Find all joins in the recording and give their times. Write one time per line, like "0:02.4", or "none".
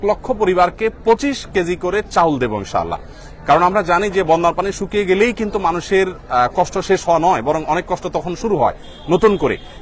none